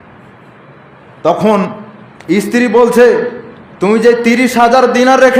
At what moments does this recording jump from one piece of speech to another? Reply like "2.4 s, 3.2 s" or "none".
none